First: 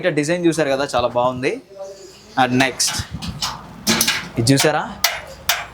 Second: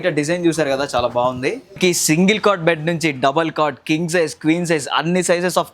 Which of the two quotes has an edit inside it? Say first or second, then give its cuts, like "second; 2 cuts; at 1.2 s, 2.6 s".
second; 1 cut; at 1.8 s